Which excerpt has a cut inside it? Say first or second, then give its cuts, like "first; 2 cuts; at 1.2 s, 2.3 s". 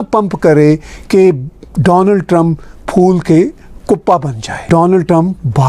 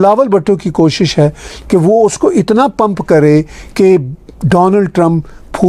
first; 1 cut; at 4.6 s